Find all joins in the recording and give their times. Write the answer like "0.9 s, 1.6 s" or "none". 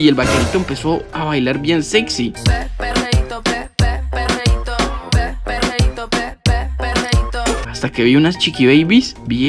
none

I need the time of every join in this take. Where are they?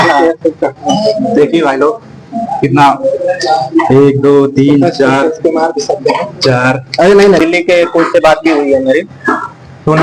7.4 s

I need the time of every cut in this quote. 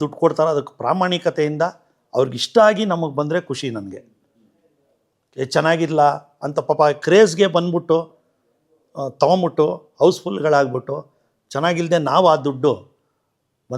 none

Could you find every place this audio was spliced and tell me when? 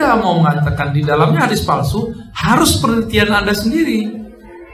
none

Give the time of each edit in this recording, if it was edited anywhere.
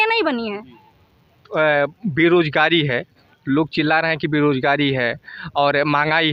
none

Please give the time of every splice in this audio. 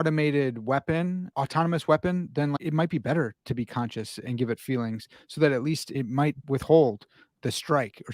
1.3 s, 2.6 s, 4.2 s, 5.9 s, 7.3 s

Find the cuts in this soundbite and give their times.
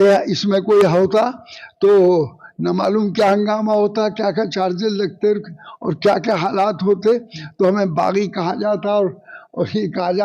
none

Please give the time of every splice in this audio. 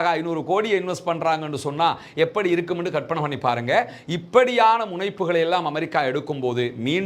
none

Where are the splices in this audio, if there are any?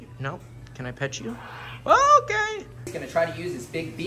2.9 s

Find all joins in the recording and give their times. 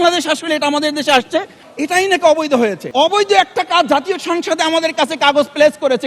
1.6 s, 2.8 s

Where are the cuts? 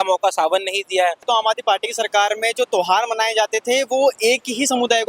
1.2 s

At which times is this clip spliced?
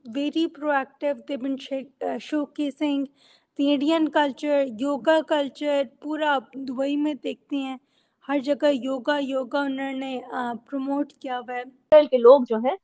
11.9 s

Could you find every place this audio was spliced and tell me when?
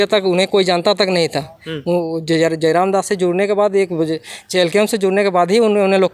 none

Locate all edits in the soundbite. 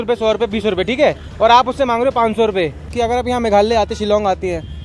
2.8 s

